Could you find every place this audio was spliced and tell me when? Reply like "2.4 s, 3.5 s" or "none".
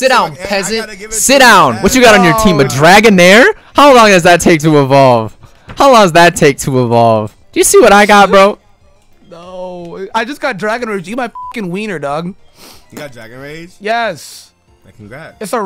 7.4 s